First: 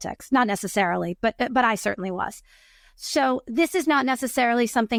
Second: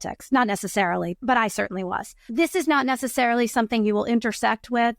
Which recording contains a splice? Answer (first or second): second